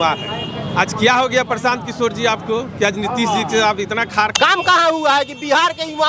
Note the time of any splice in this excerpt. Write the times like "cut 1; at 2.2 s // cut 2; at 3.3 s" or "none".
cut 1; at 4.3 s